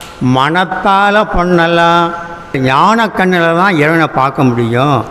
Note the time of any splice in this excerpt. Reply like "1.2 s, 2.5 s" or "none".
2.6 s

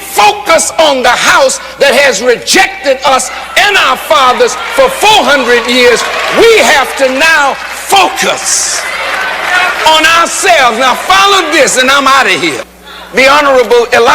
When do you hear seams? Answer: 12.7 s

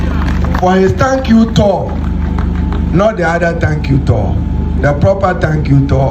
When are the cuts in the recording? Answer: none

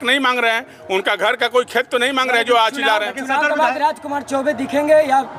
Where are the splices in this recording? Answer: none

